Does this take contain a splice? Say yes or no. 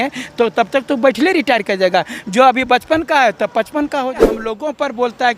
yes